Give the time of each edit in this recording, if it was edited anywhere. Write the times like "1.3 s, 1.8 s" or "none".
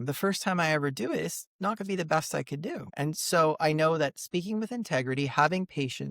2.9 s